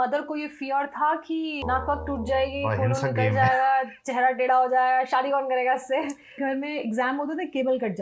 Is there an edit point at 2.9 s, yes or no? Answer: no